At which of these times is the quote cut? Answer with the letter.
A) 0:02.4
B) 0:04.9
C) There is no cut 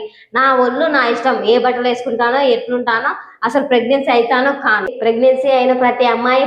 B